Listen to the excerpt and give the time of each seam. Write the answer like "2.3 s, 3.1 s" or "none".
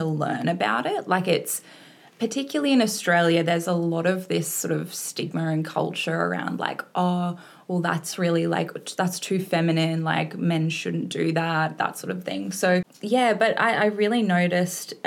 12.9 s